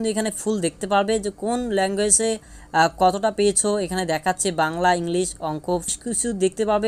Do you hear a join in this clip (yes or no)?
yes